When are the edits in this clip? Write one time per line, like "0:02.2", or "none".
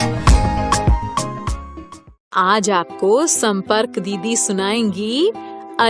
0:02.2

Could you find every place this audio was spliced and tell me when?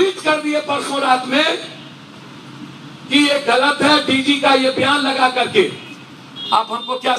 none

